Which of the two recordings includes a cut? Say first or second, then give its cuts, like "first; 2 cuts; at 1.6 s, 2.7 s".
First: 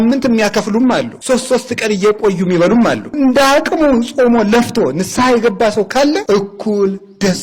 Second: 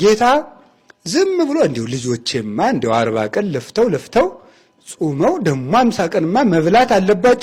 first; 3 cuts; at 1.1 s, 3.1 s, 6.2 s